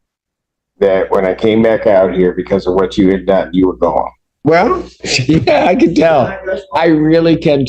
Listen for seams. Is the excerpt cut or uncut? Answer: cut